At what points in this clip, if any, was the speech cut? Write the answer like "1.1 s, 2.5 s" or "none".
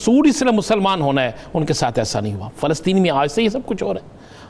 none